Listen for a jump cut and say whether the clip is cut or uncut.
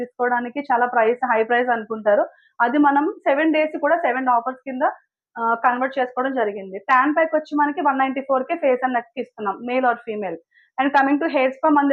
uncut